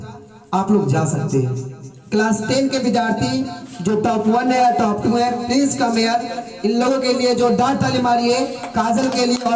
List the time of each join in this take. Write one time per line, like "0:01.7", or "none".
none